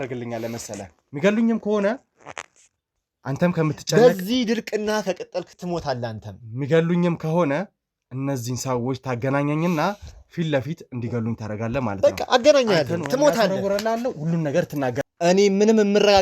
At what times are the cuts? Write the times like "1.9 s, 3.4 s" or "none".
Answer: 15.0 s